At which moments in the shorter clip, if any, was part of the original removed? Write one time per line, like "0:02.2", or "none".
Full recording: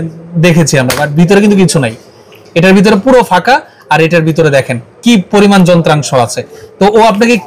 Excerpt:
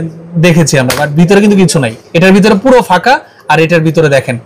0:02.0